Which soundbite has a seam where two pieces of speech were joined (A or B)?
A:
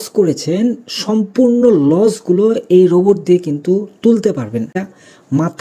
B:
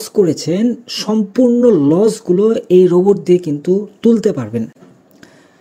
A